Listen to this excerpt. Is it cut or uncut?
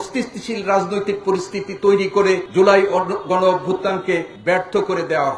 cut